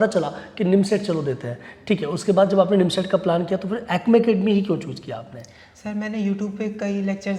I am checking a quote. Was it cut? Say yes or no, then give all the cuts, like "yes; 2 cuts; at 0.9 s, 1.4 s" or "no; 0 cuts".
no; 0 cuts